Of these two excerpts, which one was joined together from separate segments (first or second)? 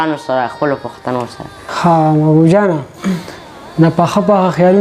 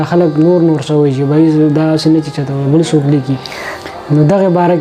first